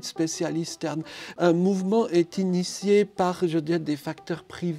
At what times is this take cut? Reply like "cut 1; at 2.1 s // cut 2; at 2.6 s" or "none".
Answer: cut 1; at 1.2 s